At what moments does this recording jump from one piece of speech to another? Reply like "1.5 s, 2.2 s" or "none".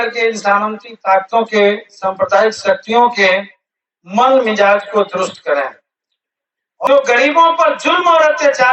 6.9 s